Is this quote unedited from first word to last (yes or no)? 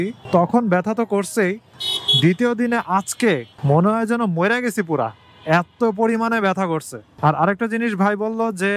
no